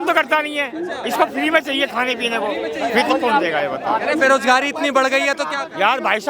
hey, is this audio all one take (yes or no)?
yes